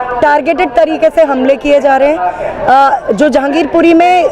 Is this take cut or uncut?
uncut